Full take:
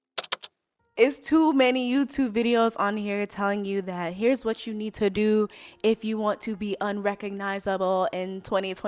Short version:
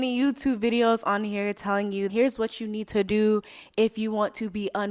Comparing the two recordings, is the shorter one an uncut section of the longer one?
no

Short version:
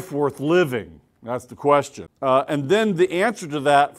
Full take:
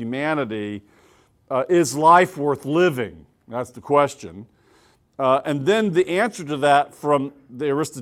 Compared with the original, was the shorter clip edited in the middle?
yes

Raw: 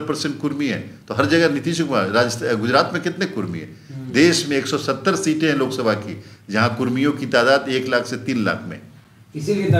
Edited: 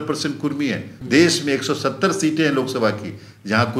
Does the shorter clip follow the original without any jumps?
no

